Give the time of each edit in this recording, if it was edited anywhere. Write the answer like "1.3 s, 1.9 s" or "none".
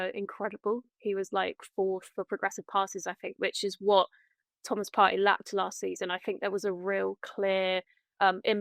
none